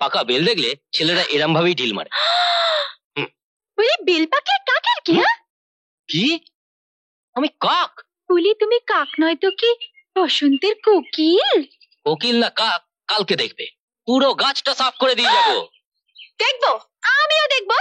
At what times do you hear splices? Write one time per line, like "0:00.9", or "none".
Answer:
none